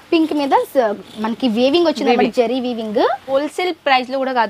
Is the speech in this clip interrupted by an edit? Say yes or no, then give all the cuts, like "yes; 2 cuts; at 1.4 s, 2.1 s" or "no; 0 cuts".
yes; 1 cut; at 3.3 s